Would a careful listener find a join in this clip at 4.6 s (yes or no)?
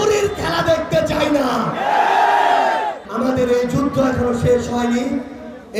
no